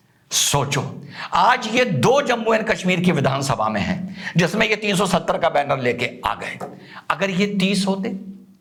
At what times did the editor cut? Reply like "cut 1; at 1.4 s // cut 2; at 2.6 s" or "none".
none